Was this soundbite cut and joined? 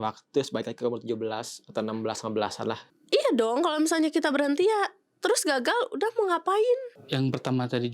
yes; 2 cuts; at 2.9 s, 7.0 s

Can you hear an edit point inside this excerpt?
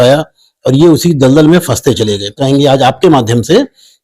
yes; 1 cut; at 2.4 s

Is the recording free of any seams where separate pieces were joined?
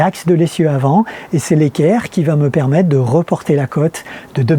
yes; 0 cuts

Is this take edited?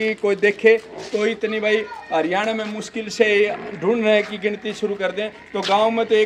no; 0 cuts

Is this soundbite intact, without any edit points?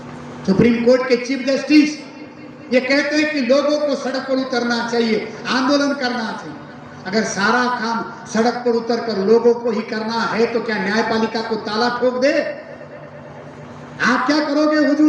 yes; 0 cuts

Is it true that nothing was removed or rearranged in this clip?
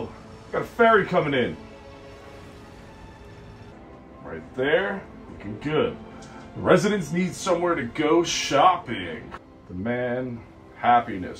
no; 2 cuts; at 3.7 s, 9.2 s

